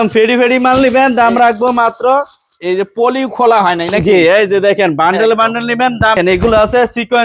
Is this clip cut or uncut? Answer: cut